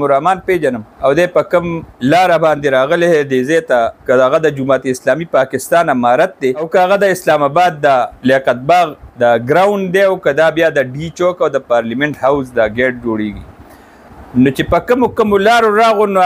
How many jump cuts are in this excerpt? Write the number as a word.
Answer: six